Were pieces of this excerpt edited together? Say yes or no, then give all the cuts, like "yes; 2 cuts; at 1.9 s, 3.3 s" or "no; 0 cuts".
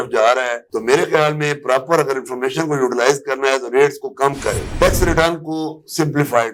no; 0 cuts